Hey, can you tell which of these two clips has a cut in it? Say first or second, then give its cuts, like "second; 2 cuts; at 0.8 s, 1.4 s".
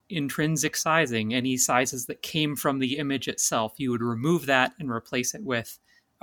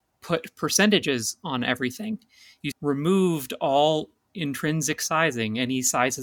second; 1 cut; at 2.6 s